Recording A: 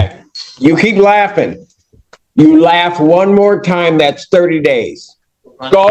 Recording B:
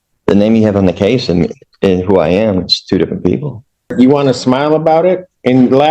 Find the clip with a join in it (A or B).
B